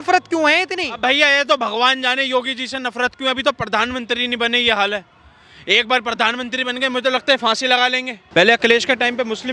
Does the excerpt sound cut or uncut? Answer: cut